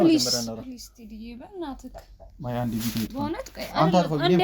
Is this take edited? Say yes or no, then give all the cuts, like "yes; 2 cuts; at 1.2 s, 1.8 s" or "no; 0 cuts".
no; 0 cuts